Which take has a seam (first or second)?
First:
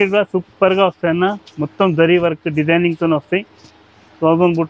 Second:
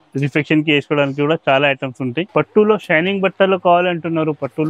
second